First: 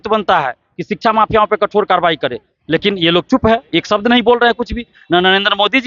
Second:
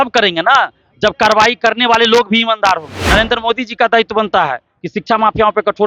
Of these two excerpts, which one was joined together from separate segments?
second; 1 cut; at 3.0 s

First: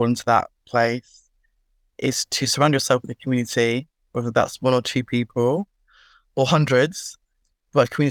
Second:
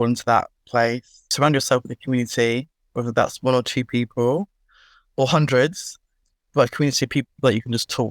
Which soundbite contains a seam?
second; 1 cut; at 1.2 s

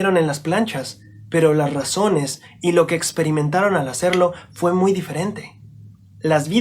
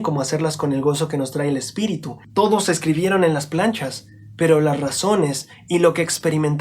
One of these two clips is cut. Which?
second; 1 cut; at 2.1 s

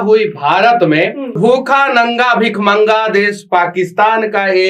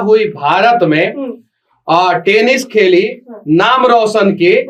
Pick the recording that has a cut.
first; 1 cut; at 1.4 s

